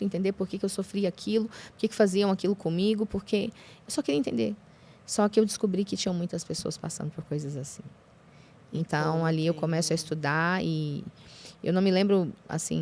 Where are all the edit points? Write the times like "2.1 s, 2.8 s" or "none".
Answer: none